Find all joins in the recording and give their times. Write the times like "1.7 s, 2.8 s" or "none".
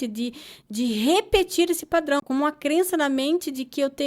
2.2 s